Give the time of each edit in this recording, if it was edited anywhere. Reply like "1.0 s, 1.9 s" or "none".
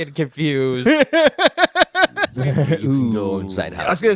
2.2 s